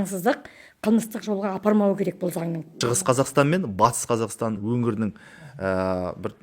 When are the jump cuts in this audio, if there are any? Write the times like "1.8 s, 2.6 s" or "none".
2.7 s, 4.6 s